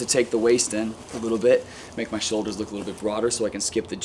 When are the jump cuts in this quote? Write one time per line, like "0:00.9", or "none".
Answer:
0:01.1